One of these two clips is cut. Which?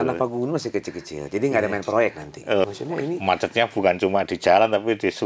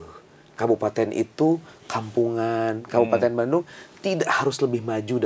first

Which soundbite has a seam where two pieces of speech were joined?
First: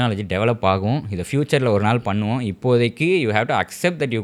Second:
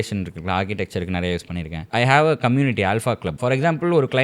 second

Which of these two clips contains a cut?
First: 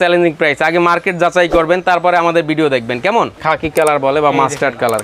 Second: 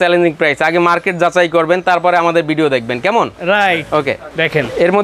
first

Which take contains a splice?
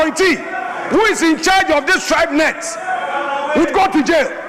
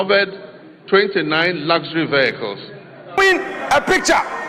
second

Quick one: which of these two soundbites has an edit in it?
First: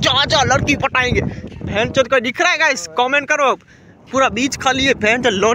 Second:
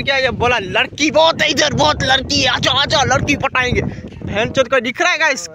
first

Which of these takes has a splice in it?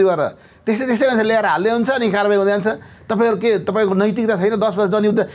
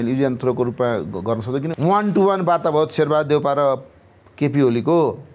second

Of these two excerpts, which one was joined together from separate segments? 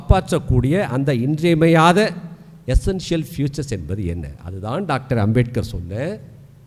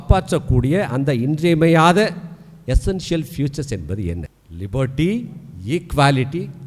second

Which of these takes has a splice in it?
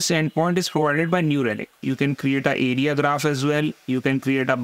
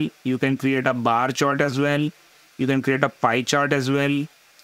first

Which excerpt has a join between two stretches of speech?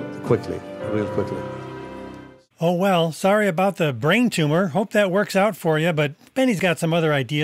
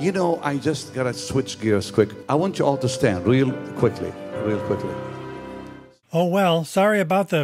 second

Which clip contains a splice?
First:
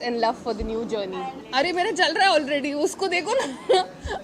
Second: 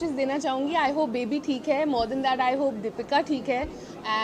first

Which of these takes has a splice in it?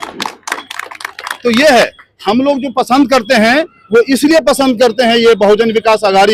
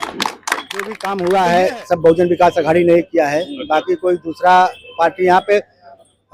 second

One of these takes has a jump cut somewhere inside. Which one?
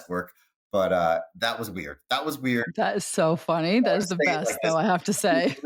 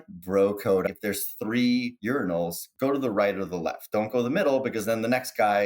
second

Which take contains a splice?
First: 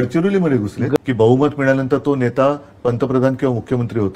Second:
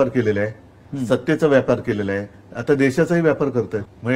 first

